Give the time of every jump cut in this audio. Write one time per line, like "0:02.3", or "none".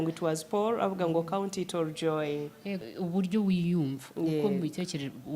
0:02.8